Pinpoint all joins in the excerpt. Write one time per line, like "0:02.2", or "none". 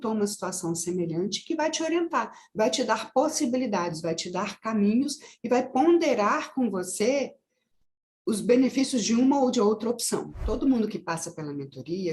0:10.4